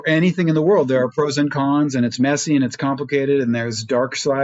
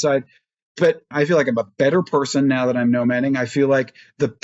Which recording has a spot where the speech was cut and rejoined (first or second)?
second